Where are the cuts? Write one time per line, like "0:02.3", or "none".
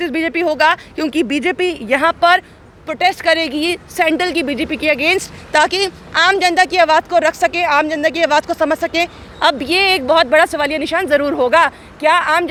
none